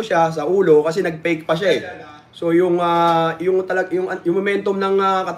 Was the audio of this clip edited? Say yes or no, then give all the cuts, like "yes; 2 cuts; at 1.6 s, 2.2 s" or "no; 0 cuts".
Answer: no; 0 cuts